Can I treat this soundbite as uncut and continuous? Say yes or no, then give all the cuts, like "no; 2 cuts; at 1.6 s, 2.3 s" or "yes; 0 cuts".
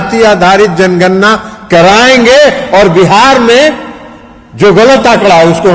yes; 0 cuts